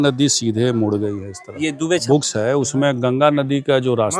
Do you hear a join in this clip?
yes; 1 cut; at 2.0 s

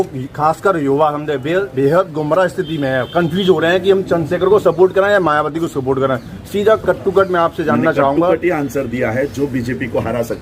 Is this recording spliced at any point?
no; 0 cuts

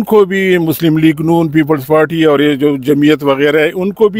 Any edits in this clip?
no; 0 cuts

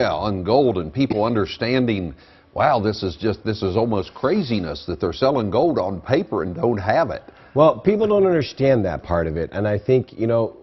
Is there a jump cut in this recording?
no; 0 cuts

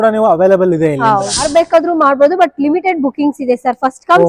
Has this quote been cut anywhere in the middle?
yes; 1 cut; at 1.5 s

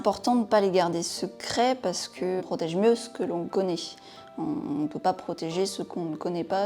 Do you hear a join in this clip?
yes; 1 cut; at 2.5 s

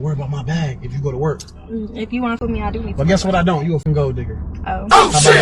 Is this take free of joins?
no; 2 cuts; at 2.4 s, 3.8 s

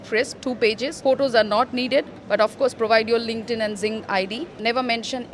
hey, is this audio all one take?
yes; 0 cuts

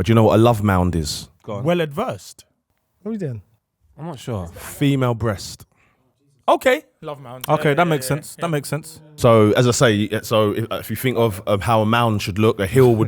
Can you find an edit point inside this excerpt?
yes; 1 cut; at 3.4 s

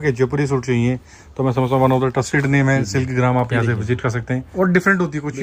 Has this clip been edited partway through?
yes; 1 cut; at 4.5 s

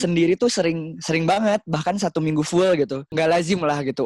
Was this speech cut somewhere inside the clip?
yes; 1 cut; at 3.1 s

